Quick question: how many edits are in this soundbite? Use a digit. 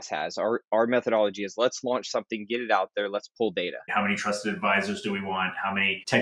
1